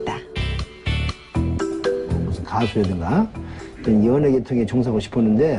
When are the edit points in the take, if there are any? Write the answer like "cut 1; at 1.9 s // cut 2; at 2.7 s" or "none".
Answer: cut 1; at 1.8 s